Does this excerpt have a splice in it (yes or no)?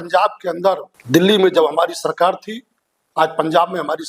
yes